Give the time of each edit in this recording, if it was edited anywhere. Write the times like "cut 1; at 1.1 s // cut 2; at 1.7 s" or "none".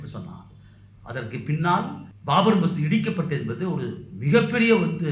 cut 1; at 2.1 s